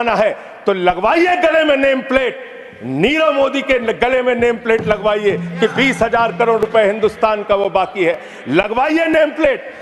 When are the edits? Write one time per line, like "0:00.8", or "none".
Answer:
none